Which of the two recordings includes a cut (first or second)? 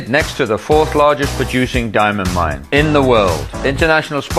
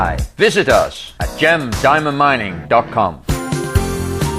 second